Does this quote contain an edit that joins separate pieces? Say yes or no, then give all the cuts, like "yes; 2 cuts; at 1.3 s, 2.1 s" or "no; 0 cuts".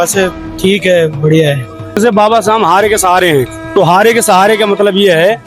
yes; 1 cut; at 2.0 s